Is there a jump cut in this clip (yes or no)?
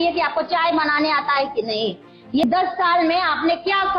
yes